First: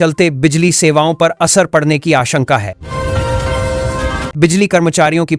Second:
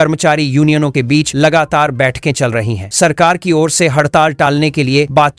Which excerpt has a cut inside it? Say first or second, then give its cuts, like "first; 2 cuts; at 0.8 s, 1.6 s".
first; 2 cuts; at 2.8 s, 4.3 s